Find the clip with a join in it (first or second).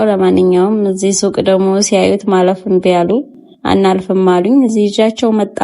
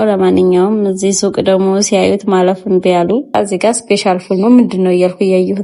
second